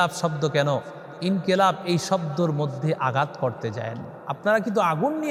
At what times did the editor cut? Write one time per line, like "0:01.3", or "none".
none